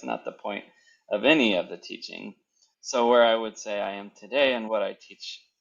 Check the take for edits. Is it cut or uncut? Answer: cut